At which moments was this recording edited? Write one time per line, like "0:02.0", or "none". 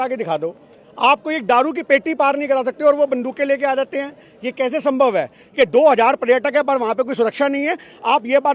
0:05.4